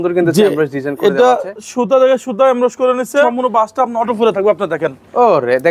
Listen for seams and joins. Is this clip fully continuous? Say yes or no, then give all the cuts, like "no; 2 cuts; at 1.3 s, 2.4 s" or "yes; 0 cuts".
no; 1 cut; at 3.4 s